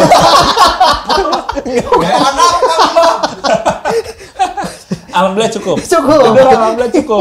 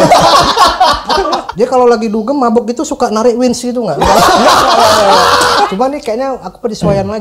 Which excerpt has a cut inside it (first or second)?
second